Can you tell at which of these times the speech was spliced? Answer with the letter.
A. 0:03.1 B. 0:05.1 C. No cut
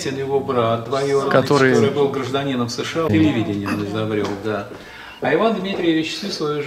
A